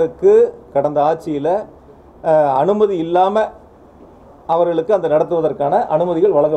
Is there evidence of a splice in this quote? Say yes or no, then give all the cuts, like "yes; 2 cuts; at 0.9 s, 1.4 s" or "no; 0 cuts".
no; 0 cuts